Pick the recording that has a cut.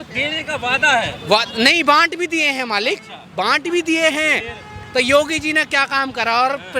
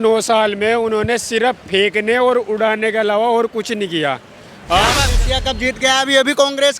second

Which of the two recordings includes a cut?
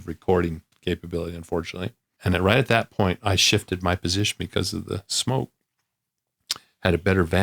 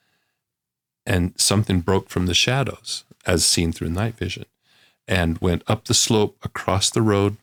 first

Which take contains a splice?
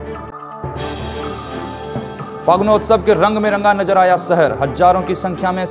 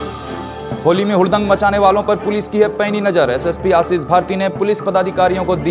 first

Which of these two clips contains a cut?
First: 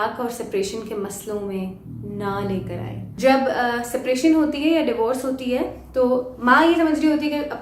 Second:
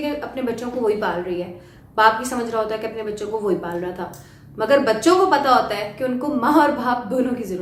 first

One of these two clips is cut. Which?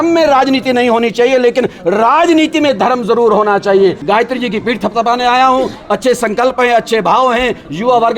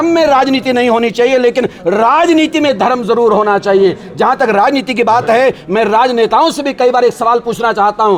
first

